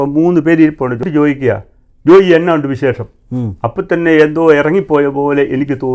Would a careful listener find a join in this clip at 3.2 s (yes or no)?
no